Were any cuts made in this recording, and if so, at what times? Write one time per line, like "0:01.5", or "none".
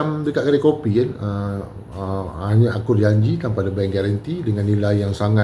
none